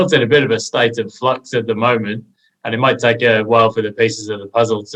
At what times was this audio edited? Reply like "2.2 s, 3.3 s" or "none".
none